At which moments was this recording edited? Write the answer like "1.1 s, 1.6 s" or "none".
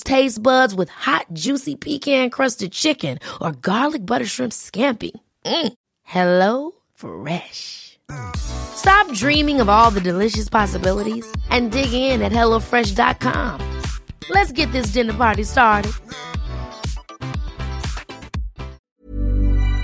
18.8 s